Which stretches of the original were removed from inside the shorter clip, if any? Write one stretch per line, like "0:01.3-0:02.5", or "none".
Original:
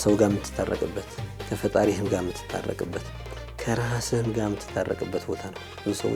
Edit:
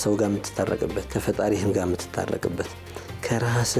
0:01.1-0:01.4